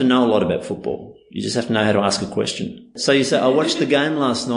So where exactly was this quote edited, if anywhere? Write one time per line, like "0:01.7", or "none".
0:02.9